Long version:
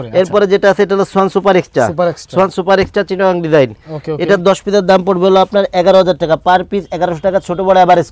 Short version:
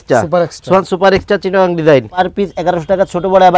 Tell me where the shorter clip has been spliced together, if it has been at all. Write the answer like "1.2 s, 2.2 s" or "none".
2.3 s